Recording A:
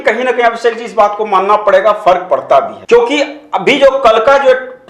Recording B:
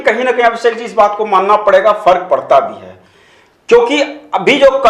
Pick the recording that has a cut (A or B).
A